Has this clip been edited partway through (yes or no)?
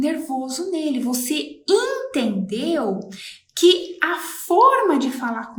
no